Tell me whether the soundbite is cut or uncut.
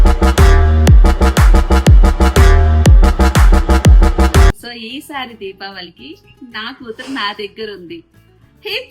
cut